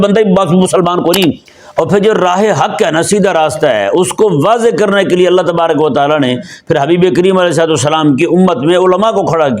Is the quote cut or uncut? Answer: cut